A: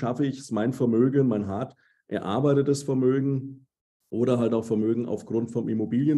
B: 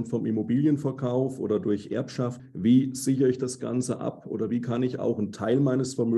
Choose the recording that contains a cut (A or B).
B